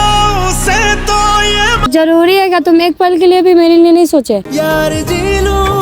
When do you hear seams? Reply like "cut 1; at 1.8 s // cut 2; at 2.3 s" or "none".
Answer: cut 1; at 1.9 s

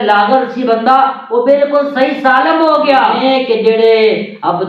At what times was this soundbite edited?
cut 1; at 3.2 s

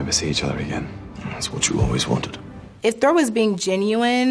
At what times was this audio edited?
cut 1; at 2.6 s

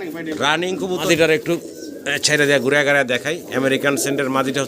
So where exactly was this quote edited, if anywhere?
cut 1; at 1.0 s

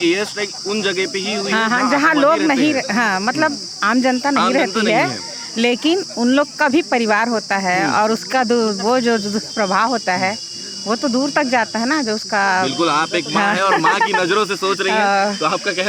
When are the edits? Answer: none

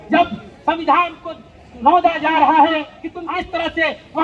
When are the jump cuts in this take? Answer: cut 1; at 3.2 s

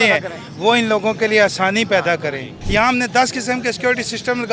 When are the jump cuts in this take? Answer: cut 1; at 2.5 s

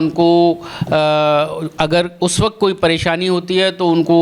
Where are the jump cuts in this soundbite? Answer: none

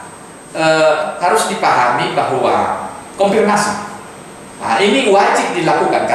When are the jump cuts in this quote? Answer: none

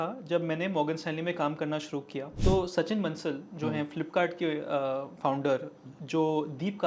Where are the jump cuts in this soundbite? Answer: cut 1; at 2.3 s

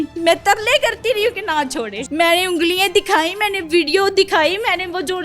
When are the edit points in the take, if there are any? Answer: cut 1; at 2.0 s

